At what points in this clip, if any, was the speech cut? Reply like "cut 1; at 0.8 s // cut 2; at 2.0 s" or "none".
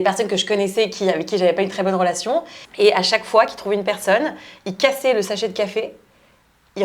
cut 1; at 2.6 s